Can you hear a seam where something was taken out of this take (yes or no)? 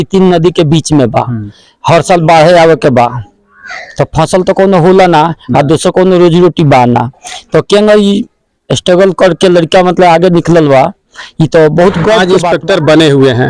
yes